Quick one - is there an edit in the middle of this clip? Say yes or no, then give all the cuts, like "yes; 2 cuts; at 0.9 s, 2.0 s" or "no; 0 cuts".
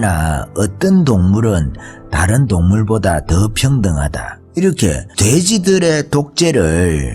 no; 0 cuts